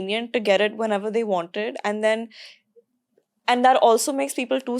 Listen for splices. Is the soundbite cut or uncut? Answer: uncut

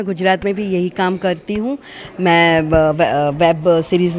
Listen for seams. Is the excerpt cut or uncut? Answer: uncut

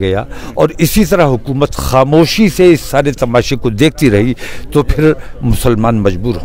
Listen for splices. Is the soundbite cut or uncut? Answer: uncut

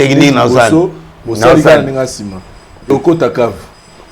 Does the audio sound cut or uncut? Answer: cut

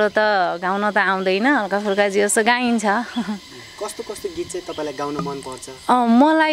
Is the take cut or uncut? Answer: uncut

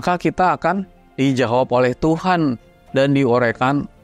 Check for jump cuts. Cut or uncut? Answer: cut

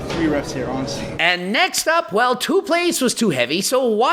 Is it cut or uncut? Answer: cut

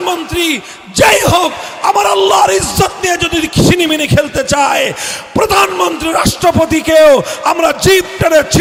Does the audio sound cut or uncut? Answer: uncut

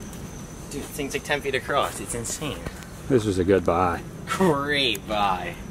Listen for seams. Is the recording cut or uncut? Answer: uncut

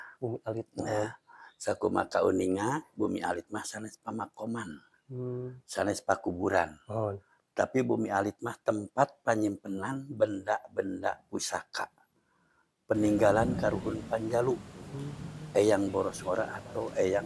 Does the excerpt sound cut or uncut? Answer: uncut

